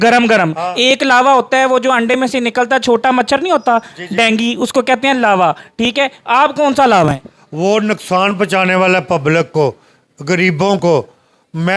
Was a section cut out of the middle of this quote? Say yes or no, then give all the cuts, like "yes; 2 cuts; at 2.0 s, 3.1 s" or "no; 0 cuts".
no; 0 cuts